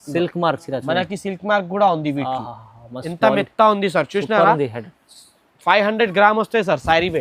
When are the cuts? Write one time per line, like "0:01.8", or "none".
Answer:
none